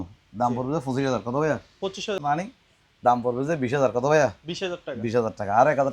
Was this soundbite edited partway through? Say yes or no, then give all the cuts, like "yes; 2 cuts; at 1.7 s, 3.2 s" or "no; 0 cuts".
yes; 1 cut; at 2.2 s